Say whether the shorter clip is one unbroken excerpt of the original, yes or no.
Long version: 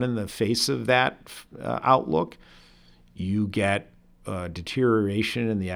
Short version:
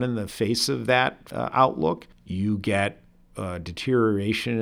no